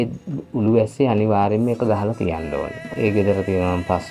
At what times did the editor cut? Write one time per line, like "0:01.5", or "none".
0:02.9